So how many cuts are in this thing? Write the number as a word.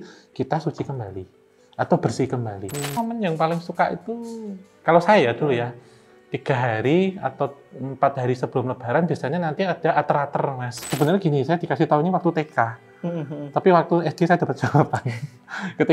two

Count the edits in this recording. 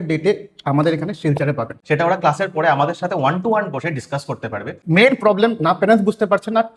two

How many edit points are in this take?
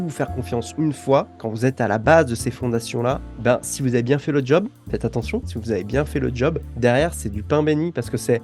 zero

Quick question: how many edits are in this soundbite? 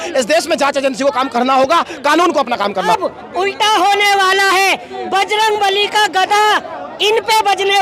one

